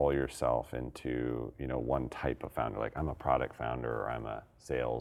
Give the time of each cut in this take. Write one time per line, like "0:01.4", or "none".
none